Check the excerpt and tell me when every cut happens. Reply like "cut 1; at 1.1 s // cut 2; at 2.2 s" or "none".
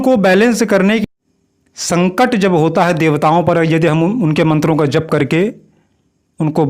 cut 1; at 1.0 s